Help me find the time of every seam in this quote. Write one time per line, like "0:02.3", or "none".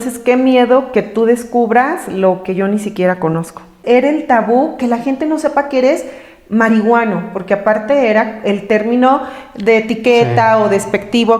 0:03.8